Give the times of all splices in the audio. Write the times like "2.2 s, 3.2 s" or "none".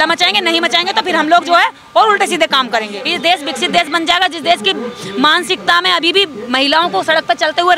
3.0 s